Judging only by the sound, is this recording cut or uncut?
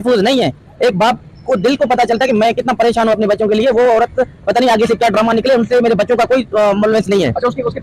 uncut